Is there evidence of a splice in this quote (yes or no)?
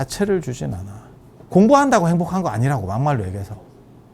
no